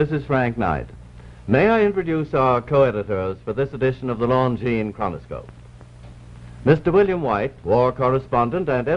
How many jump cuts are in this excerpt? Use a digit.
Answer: 1